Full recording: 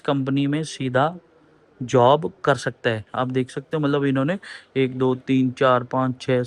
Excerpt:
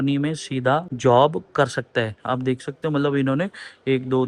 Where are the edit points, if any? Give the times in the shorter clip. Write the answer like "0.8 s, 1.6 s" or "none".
0.9 s